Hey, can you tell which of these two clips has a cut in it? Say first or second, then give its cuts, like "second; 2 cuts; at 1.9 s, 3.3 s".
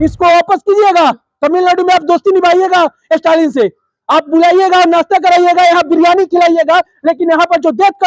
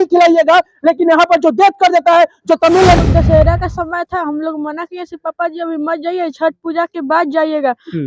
second; 1 cut; at 3.0 s